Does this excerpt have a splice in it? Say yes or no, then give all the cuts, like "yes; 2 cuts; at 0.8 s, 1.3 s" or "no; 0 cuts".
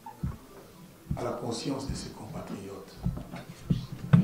no; 0 cuts